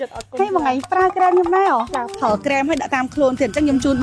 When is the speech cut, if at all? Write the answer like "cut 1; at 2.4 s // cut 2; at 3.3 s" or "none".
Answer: cut 1; at 2.2 s